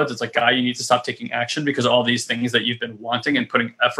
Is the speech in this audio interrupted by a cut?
no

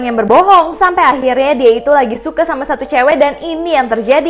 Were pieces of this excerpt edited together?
no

